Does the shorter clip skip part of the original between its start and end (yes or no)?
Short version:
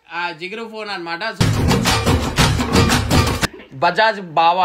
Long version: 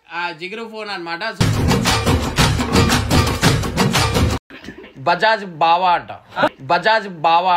yes